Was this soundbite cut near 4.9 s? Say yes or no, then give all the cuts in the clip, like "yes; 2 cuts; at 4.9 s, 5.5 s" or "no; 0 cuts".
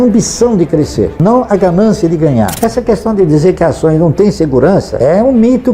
yes; 3 cuts; at 1.1 s, 2.5 s, 4.9 s